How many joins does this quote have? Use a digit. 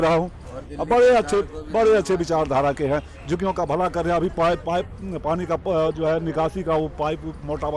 0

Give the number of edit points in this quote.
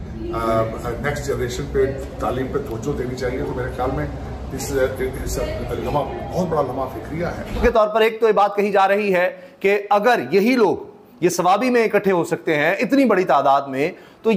1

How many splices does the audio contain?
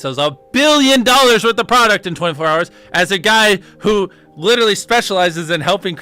0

